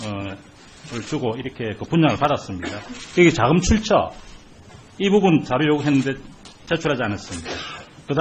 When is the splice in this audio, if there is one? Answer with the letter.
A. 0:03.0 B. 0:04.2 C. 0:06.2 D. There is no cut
D